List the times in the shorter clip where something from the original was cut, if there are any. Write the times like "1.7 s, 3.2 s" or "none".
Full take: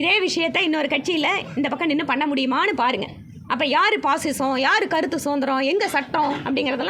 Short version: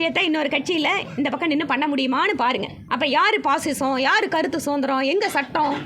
2.8 s